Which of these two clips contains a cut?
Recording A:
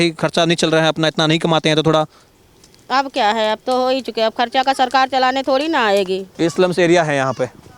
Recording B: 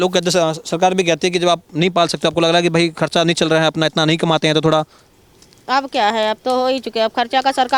A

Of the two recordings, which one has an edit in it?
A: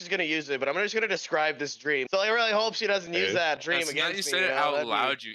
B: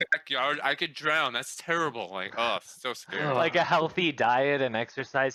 A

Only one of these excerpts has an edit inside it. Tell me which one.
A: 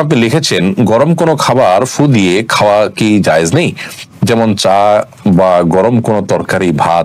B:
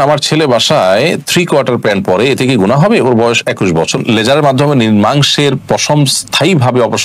B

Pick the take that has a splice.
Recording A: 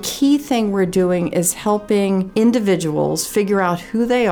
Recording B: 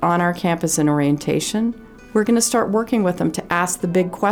A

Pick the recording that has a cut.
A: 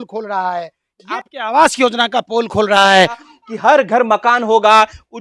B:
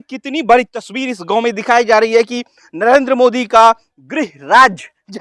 A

